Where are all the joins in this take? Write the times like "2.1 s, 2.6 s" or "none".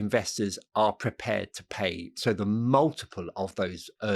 2.1 s

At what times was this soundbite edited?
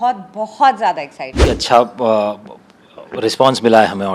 1.4 s

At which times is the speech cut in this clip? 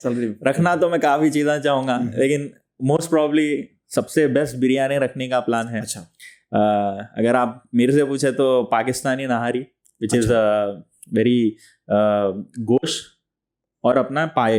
none

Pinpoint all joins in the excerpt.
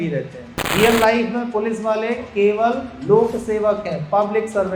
2.9 s

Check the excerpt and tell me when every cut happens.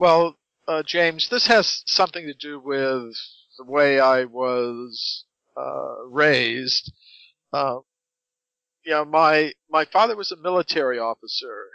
none

